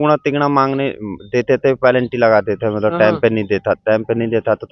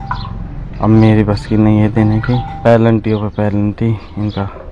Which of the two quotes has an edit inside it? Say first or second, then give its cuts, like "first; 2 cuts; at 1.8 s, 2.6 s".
second; 1 cut; at 2.5 s